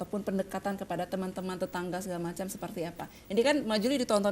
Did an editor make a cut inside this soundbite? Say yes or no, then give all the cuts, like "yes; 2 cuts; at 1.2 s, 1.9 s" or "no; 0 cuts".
yes; 1 cut; at 2.3 s